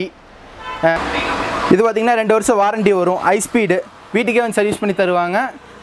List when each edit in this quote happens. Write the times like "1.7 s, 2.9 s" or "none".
1.0 s